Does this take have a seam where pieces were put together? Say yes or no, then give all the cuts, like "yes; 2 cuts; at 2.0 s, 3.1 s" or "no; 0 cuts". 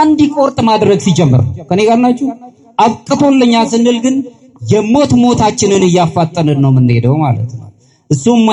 no; 0 cuts